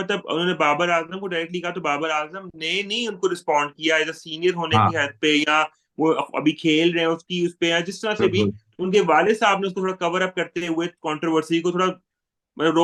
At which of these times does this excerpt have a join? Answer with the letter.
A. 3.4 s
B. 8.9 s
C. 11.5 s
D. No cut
D